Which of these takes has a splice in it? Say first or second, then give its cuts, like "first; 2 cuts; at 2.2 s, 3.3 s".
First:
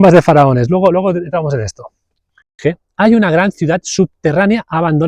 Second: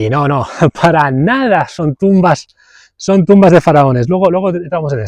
first; 1 cut; at 2.6 s